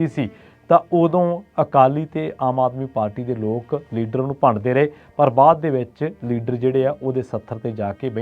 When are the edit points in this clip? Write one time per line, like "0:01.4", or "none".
none